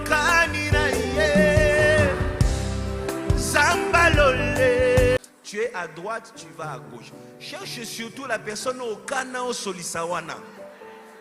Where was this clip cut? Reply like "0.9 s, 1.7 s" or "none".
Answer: 5.2 s